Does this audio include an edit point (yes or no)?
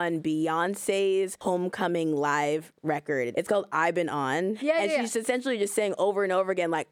yes